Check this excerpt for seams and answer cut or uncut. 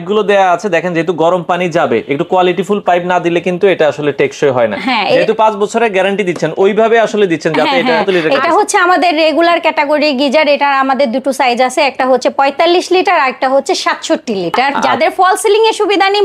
cut